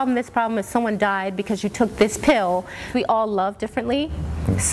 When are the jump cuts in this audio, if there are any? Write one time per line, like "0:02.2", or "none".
0:02.9